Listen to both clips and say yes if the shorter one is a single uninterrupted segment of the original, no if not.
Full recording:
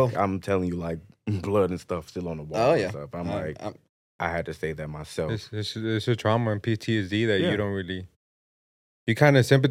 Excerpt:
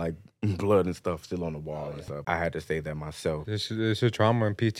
no